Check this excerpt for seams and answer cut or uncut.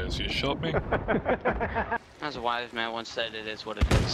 cut